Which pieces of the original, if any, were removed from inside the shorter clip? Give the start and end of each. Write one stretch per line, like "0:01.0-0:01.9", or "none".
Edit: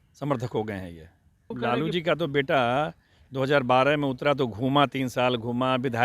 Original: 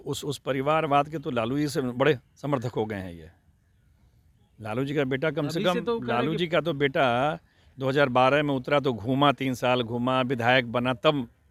0:03.8-0:06.0